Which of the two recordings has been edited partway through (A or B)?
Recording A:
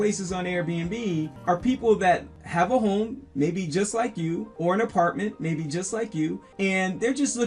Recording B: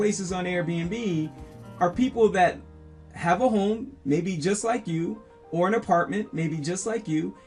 A